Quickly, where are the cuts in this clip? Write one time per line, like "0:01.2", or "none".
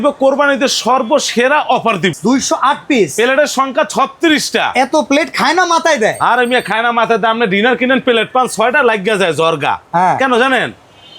0:02.1